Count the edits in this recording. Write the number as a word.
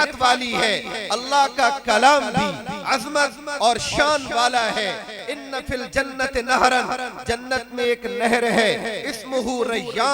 one